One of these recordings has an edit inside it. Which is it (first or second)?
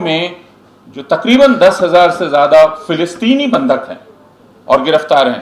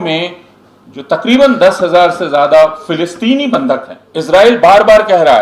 second